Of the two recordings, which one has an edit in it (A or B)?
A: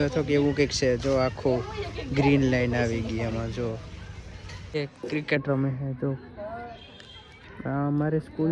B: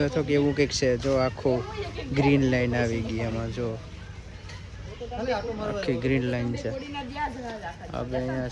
A